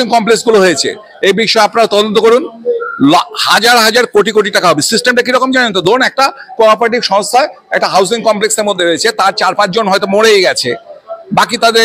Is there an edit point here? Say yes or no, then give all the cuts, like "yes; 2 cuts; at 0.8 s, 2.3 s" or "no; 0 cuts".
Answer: no; 0 cuts